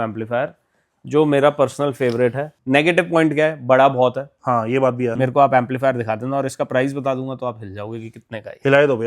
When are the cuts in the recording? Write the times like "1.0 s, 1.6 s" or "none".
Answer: 2.5 s, 5.1 s